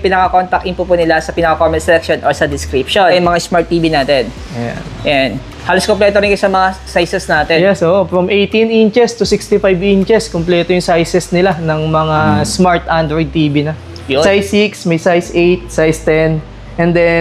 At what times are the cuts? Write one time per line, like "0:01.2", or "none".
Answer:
0:03.1
0:14.2